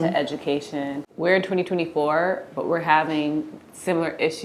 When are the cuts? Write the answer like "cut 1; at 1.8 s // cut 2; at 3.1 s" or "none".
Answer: cut 1; at 1.1 s